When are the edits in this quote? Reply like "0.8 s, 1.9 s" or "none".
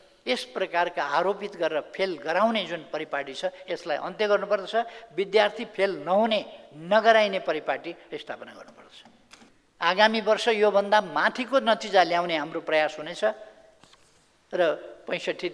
9.5 s